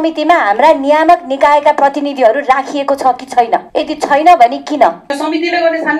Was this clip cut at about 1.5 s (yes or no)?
no